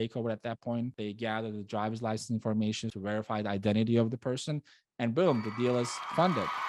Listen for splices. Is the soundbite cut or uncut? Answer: cut